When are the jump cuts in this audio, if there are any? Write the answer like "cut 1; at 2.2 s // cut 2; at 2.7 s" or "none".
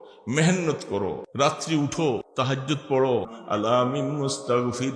cut 1; at 1.2 s // cut 2; at 2.3 s // cut 3; at 3.4 s

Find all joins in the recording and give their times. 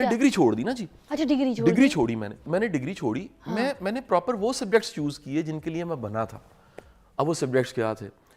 cut 1; at 2.4 s

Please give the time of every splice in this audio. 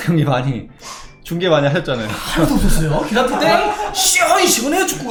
none

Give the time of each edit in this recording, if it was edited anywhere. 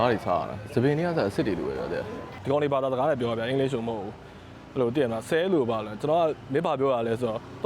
cut 1; at 2.2 s

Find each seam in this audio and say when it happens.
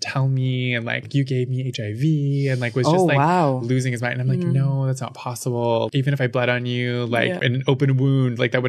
cut 1; at 2.5 s // cut 2; at 3.9 s

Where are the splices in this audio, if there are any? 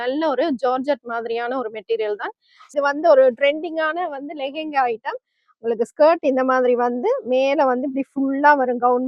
cut 1; at 2.7 s

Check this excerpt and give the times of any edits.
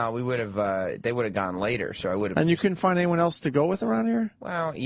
cut 1; at 3.8 s

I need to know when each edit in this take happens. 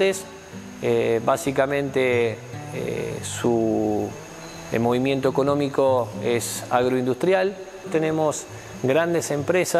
cut 1; at 7.9 s

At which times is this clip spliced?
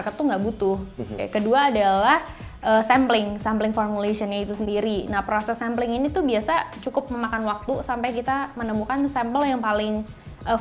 cut 1; at 1.3 s

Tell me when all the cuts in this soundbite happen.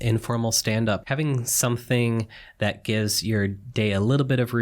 cut 1; at 1.0 s

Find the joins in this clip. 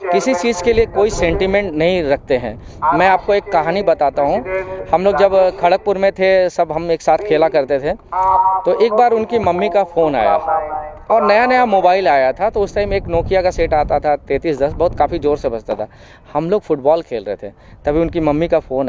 none

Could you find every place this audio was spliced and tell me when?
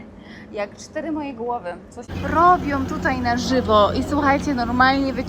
cut 1; at 2.1 s

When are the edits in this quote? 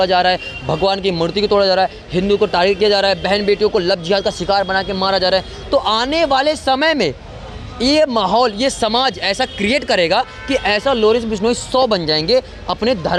none

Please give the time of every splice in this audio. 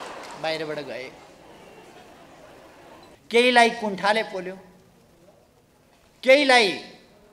cut 1; at 3.1 s

